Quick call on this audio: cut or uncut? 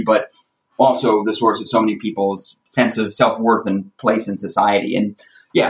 uncut